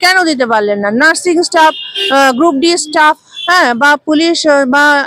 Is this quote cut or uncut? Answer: uncut